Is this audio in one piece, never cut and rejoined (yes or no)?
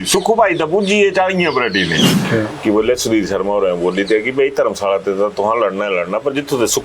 no